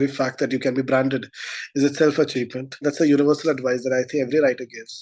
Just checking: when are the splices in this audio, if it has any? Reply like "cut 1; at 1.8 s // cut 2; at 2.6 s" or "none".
cut 1; at 2.8 s

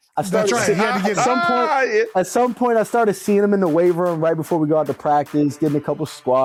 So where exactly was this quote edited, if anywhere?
none

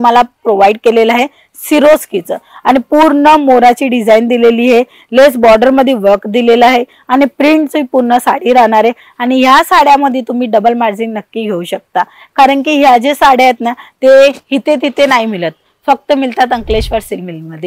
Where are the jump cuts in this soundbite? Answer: none

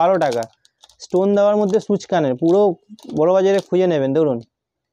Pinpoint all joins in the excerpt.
none

